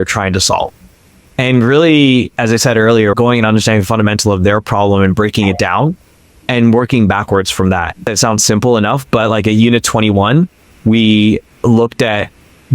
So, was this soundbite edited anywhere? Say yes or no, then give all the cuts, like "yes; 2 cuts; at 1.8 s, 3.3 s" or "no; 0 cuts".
yes; 1 cut; at 8.1 s